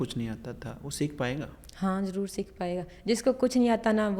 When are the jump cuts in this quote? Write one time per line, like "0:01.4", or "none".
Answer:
none